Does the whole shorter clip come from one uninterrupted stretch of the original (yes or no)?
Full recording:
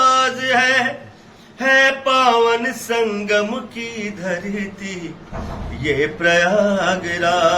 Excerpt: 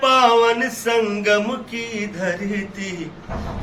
yes